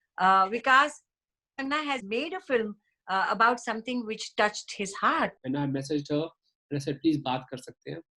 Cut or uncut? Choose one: cut